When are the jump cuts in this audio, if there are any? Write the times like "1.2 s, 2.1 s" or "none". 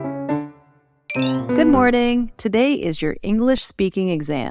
1.6 s